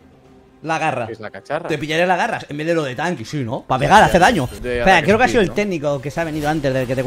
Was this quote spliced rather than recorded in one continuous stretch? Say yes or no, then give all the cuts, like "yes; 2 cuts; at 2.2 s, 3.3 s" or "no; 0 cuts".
yes; 1 cut; at 4.6 s